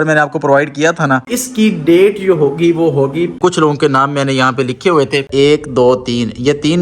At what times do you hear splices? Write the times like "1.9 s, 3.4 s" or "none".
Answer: 1.4 s, 3.4 s, 5.3 s